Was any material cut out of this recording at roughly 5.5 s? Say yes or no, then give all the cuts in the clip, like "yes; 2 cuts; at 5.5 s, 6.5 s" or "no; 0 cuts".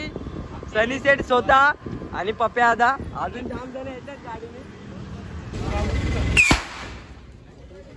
yes; 1 cut; at 5.5 s